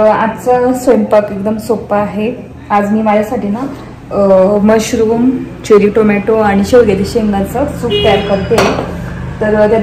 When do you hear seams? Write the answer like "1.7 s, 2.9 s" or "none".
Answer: none